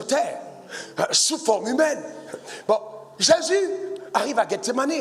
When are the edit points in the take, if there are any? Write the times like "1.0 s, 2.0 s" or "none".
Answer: none